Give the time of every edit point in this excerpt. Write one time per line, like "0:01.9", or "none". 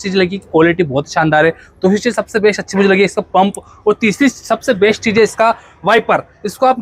none